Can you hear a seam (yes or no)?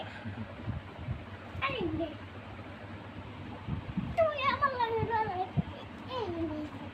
no